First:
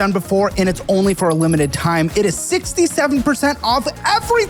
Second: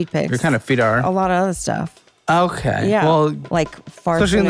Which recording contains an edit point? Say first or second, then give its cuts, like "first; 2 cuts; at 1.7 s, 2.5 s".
second; 1 cut; at 3.4 s